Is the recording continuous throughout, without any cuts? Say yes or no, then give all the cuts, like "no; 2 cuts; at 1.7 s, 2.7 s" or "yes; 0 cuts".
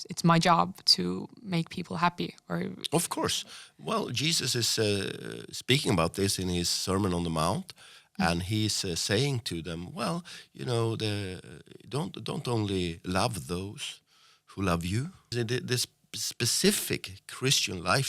no; 1 cut; at 15.3 s